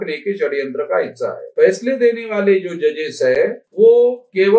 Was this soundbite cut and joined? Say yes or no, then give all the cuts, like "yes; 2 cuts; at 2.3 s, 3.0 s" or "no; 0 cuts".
yes; 1 cut; at 1.5 s